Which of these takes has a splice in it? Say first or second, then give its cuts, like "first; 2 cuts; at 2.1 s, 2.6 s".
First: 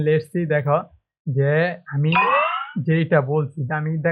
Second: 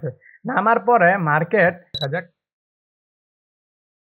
second; 1 cut; at 1.9 s